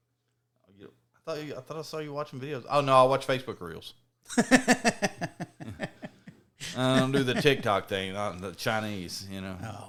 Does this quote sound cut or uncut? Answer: uncut